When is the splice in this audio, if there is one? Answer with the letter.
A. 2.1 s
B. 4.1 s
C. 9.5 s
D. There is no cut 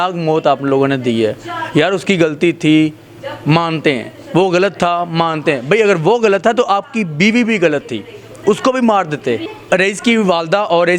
C